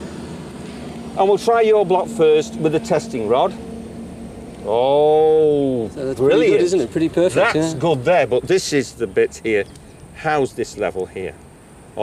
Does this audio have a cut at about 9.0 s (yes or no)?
yes